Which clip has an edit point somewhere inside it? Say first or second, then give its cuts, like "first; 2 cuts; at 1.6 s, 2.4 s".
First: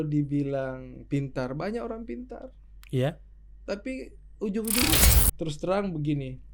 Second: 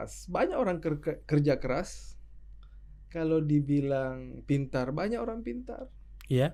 first; 1 cut; at 4.9 s